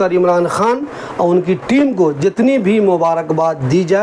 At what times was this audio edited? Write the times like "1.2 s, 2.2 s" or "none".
none

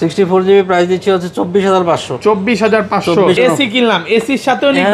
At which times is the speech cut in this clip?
3.4 s

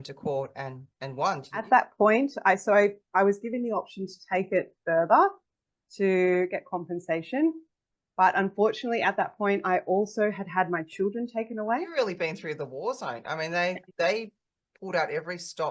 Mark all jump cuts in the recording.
1.7 s, 11.9 s

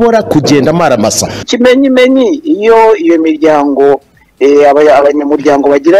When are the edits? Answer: 1.5 s

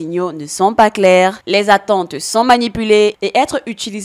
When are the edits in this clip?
3.1 s

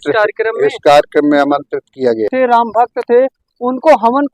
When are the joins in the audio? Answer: 2.6 s

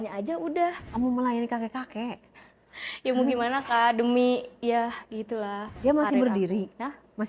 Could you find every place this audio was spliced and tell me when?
0.8 s, 5.8 s

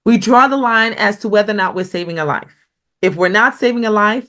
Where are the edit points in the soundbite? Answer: none

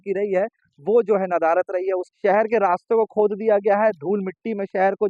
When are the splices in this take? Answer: 2.1 s

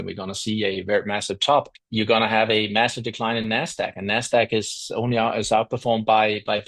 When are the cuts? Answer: 1.8 s

